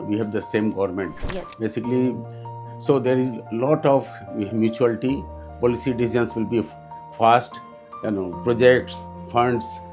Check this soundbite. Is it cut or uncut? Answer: uncut